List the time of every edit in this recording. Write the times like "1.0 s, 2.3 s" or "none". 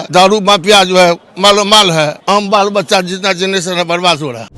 2.2 s